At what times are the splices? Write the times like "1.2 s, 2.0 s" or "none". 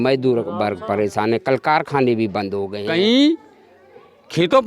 2.7 s